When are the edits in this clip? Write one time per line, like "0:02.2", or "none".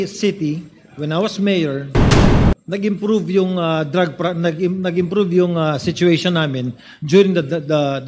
none